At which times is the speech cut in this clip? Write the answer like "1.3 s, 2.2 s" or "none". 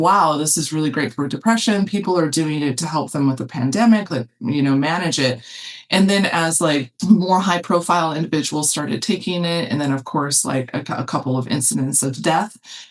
6.9 s